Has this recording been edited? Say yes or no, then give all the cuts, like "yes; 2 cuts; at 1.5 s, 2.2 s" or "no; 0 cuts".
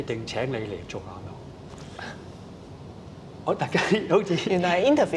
no; 0 cuts